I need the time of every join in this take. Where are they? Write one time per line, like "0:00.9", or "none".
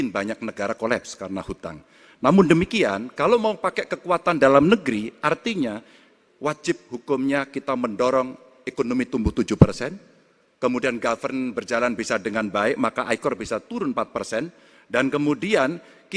none